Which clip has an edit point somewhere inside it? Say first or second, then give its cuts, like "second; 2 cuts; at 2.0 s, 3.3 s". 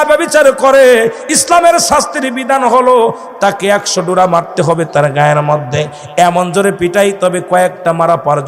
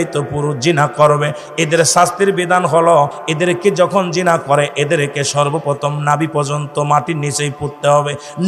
second; 1 cut; at 3.2 s